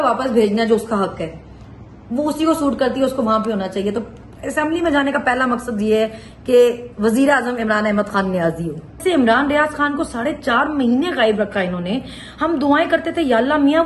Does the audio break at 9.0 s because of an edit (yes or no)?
yes